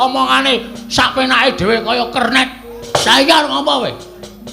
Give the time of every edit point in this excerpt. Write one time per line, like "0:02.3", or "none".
0:02.8